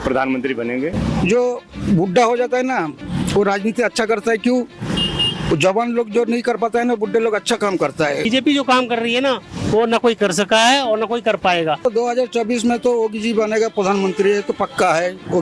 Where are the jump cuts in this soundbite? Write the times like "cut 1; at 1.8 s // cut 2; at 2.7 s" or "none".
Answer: cut 1; at 1.0 s // cut 2; at 8.3 s // cut 3; at 11.8 s